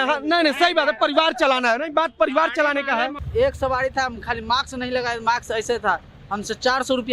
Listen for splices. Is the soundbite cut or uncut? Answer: cut